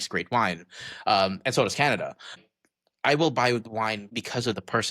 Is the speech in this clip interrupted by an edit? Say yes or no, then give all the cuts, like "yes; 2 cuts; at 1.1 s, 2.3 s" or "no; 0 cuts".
yes; 2 cuts; at 2.4 s, 4.1 s